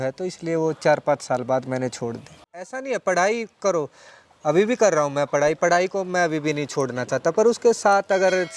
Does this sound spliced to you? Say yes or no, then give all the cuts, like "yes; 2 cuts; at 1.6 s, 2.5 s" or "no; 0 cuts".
yes; 1 cut; at 2.4 s